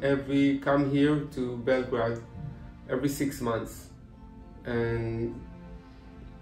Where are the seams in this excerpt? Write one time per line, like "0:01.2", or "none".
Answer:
none